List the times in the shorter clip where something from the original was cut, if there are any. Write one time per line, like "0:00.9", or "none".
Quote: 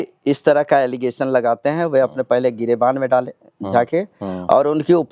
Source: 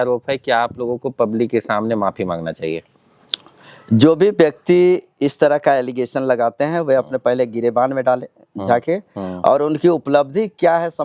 none